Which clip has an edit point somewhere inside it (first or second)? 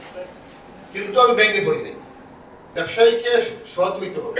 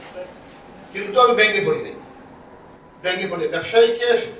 first